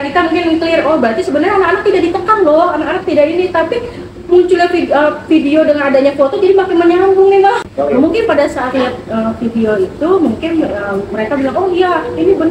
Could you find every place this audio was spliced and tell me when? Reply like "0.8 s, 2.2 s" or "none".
7.6 s